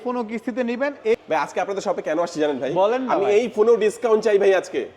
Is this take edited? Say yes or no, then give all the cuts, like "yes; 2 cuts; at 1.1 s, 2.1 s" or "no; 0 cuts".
yes; 1 cut; at 1.2 s